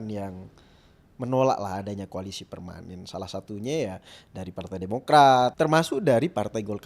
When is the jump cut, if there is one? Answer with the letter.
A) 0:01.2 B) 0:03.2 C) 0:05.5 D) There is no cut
C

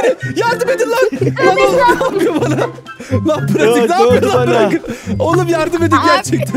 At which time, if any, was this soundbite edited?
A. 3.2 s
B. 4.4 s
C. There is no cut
C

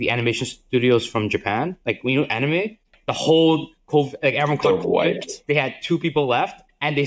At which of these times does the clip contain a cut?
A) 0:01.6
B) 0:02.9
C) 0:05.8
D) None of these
B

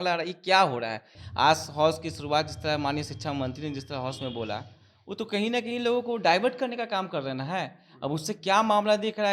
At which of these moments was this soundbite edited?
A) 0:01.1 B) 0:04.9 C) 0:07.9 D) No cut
A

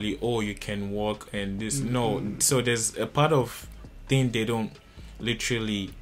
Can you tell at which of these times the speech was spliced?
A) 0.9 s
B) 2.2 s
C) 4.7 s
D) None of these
D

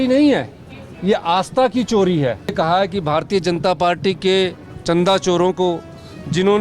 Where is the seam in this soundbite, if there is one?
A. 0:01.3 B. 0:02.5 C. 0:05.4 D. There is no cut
B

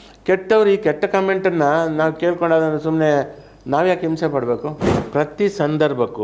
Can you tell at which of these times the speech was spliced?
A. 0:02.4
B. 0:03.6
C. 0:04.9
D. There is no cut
C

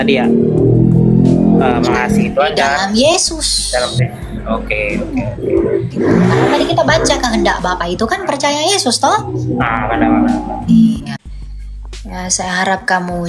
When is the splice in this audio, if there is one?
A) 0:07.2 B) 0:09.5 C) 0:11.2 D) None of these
C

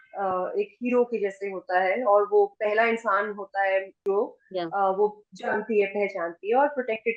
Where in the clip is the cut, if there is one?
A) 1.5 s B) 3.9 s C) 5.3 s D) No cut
B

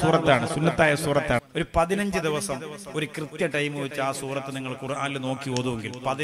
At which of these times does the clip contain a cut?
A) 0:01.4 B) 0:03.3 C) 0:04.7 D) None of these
A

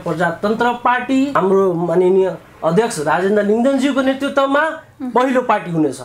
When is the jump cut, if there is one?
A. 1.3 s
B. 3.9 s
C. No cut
A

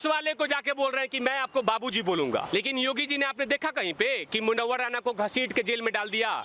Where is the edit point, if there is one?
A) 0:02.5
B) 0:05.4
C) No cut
A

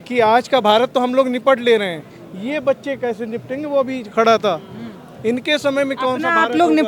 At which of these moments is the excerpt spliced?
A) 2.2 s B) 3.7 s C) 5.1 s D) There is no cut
D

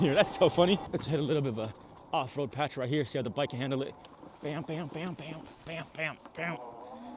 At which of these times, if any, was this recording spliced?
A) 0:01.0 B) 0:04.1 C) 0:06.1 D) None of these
A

